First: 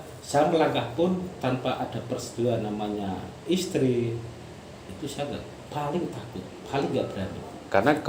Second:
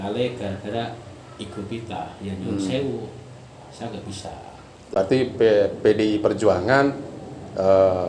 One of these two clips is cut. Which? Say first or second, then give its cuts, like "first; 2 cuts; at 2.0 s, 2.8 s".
second; 1 cut; at 4.9 s